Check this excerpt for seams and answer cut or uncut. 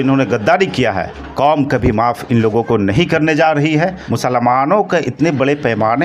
cut